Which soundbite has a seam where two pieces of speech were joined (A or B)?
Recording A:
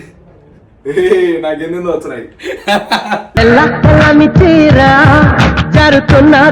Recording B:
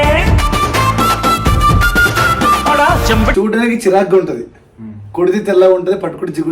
B